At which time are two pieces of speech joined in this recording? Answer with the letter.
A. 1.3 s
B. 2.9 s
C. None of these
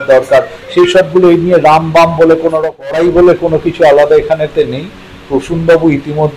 B